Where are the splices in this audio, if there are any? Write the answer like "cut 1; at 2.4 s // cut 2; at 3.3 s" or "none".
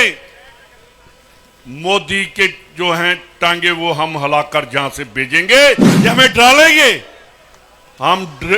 cut 1; at 5.9 s